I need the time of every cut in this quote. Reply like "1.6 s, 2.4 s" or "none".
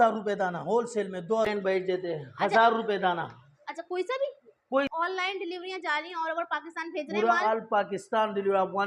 1.5 s, 4.9 s

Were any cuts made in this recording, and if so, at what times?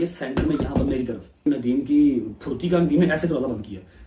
1.4 s

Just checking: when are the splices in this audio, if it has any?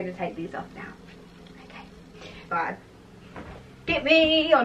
2.5 s

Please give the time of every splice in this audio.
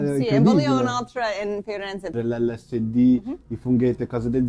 2.1 s

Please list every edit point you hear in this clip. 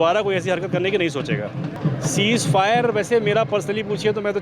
1.8 s

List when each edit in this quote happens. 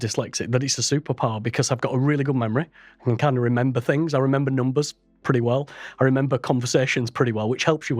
none

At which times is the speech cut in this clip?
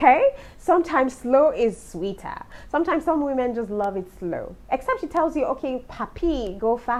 none

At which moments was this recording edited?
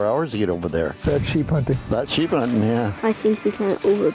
1.0 s, 2.9 s

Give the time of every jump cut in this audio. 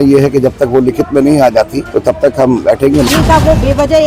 1.8 s, 3.1 s

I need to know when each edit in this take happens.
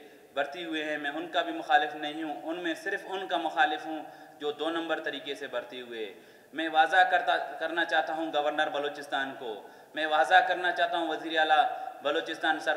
none

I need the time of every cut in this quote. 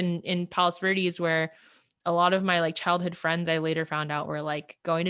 none

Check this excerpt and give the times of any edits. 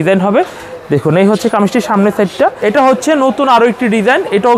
2.6 s

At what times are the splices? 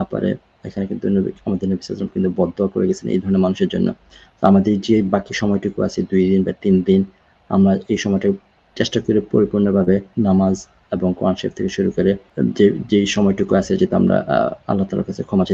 10.1 s, 12.3 s

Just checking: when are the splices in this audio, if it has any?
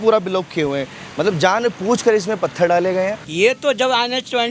3.2 s

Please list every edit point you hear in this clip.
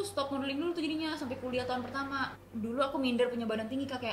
2.4 s

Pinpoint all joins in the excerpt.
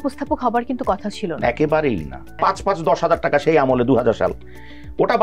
2.3 s

